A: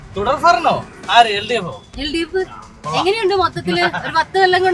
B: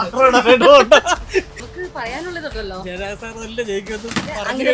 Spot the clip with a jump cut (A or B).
B